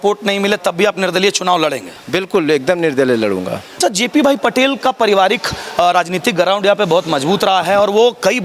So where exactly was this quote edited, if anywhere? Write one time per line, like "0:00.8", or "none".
0:03.7